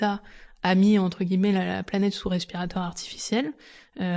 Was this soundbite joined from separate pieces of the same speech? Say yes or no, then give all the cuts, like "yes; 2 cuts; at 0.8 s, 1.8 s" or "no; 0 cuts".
no; 0 cuts